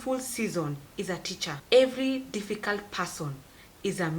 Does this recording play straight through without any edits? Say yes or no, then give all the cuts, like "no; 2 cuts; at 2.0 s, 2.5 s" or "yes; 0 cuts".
no; 1 cut; at 1.5 s